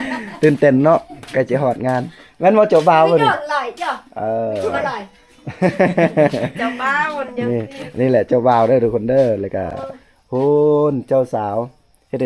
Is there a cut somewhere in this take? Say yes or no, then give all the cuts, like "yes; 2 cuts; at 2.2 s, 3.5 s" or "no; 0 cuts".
no; 0 cuts